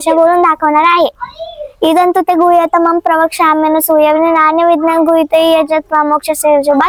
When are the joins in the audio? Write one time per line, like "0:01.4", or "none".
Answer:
none

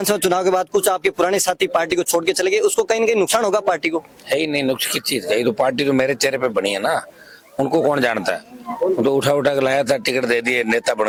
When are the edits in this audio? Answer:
none

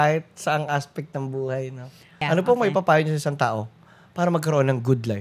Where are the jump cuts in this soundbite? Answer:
0:02.2

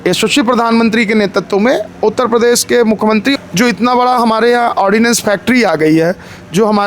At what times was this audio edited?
0:03.3

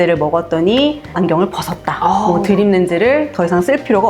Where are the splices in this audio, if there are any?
0:01.1

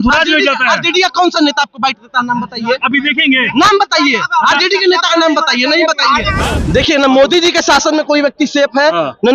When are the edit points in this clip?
0:06.4

